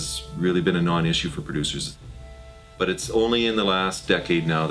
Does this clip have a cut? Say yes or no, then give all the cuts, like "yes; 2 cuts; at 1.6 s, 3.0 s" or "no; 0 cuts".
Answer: yes; 1 cut; at 2.1 s